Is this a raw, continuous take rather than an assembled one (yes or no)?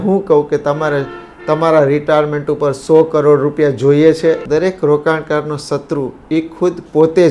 no